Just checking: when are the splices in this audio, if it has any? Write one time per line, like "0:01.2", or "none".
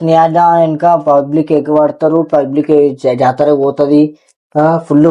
none